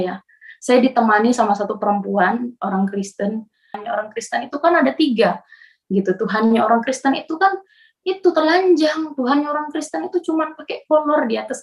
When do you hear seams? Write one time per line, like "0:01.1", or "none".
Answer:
0:03.8